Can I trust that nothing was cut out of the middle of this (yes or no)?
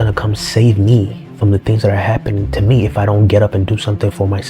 no